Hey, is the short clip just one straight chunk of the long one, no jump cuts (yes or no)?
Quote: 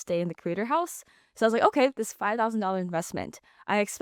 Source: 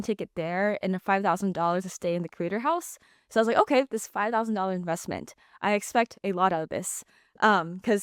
yes